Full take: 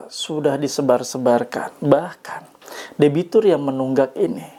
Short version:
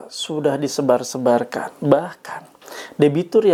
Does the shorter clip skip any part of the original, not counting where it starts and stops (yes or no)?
no